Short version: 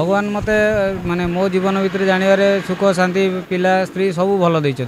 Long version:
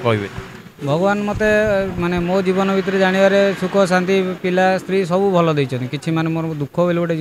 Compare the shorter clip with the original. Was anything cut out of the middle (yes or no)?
no